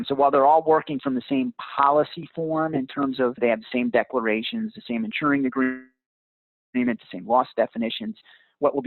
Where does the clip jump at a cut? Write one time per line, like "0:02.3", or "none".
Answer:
0:03.4